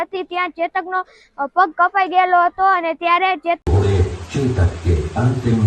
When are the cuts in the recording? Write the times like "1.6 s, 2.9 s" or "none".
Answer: 3.6 s